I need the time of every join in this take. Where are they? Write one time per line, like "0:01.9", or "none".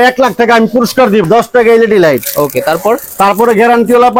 0:01.2